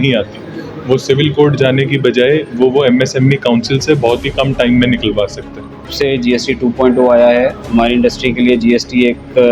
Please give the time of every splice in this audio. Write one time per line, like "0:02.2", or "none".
0:05.9